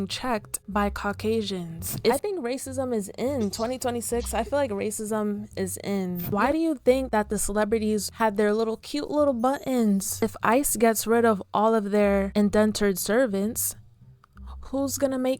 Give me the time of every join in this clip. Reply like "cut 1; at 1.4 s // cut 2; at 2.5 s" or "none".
cut 1; at 2.1 s // cut 2; at 6.2 s // cut 3; at 10.2 s